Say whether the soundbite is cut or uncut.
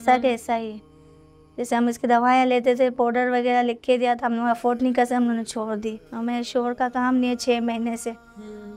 cut